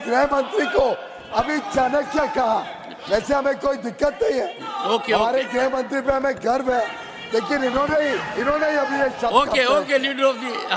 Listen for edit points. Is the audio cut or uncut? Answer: uncut